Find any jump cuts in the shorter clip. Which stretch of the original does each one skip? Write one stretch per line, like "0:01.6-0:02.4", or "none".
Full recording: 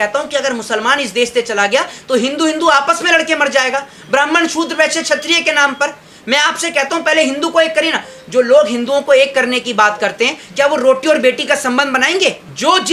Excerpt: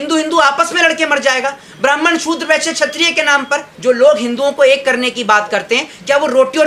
0:06.0-0:08.2